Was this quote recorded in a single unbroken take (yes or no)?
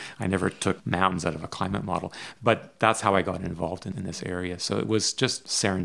no